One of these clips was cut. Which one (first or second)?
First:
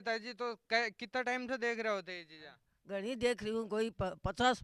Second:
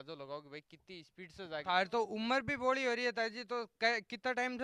second